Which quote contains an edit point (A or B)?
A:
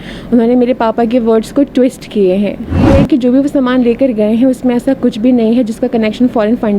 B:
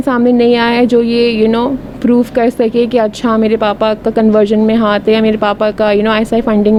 A